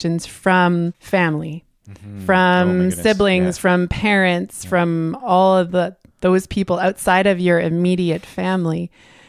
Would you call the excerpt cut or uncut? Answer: cut